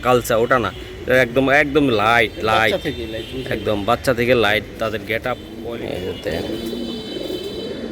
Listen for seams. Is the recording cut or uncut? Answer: cut